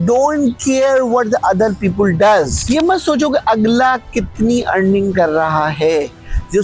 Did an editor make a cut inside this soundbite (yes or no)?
yes